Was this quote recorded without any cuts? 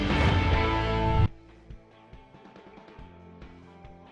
no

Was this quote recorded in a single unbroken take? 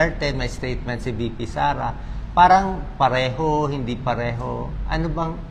yes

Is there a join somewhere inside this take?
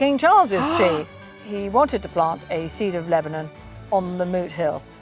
yes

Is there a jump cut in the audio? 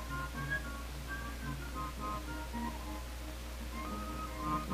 no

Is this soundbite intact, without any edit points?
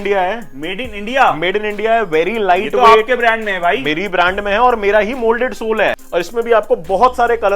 no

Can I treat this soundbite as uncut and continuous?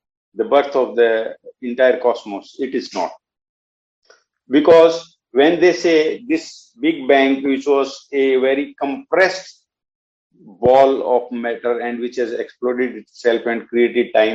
yes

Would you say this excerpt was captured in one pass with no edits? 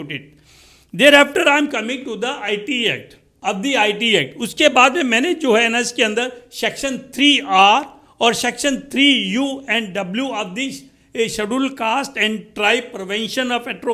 no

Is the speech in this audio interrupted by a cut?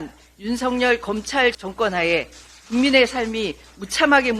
yes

